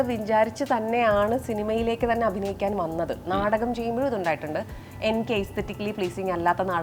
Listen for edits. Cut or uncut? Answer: uncut